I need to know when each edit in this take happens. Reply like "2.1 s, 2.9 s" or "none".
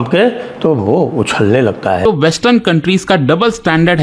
2.1 s